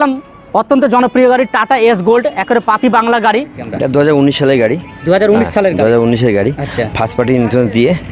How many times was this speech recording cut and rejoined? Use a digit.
1